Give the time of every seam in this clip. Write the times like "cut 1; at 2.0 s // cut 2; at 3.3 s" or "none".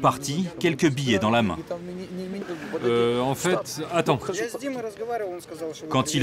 cut 1; at 2.4 s